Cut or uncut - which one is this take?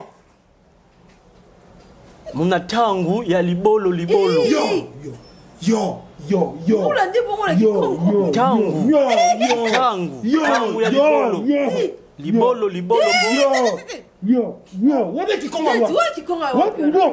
uncut